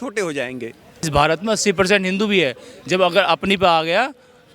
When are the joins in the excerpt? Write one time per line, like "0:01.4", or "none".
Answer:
0:01.0